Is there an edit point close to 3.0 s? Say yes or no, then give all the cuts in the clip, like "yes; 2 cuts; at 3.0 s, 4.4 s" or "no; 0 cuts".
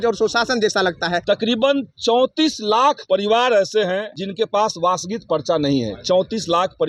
yes; 3 cuts; at 1.2 s, 3.0 s, 4.2 s